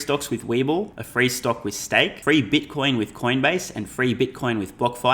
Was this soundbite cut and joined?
yes; 2 cuts; at 1.0 s, 2.2 s

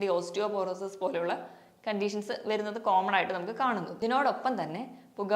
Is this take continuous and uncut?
no; 1 cut; at 3.9 s

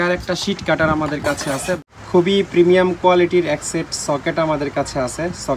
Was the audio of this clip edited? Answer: yes; 1 cut; at 1.8 s

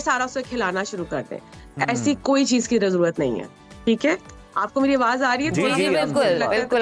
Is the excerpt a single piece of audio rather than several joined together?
yes; 0 cuts

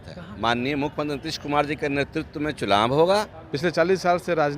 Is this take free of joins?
no; 1 cut; at 3.4 s

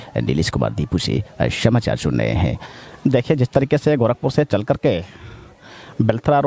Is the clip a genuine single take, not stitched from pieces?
no; 1 cut; at 2.7 s

